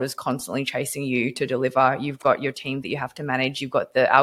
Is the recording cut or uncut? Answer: uncut